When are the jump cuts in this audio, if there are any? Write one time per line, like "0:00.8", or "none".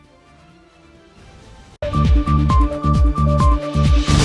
0:01.8